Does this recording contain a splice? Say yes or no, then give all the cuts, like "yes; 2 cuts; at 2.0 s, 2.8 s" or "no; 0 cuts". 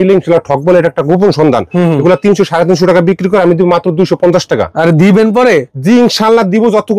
no; 0 cuts